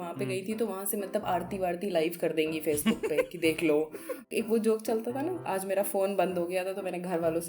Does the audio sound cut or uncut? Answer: cut